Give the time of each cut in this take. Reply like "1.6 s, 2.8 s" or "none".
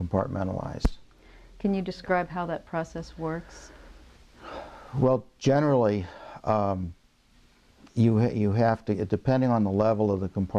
6.3 s